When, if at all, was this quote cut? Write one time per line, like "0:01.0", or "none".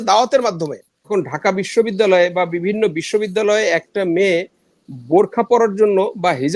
0:01.1